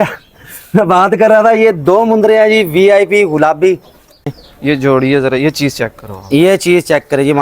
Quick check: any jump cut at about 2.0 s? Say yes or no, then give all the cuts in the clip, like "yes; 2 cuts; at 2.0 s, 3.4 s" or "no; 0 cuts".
no; 1 cut; at 4.3 s